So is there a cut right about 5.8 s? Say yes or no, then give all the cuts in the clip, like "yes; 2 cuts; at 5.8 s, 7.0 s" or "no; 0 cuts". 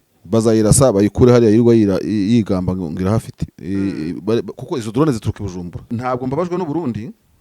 yes; 1 cut; at 5.8 s